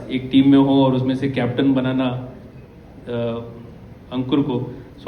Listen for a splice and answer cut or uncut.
uncut